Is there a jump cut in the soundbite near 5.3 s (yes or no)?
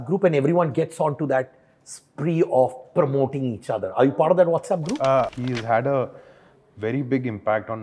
yes